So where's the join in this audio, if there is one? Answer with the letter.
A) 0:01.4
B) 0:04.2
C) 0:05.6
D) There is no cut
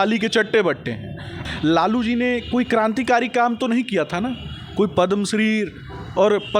A